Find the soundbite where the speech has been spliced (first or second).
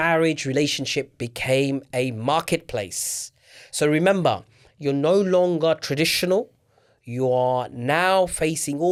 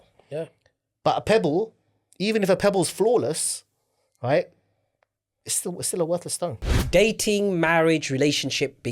second